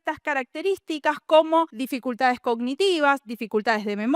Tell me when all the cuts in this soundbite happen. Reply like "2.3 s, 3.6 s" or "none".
1.8 s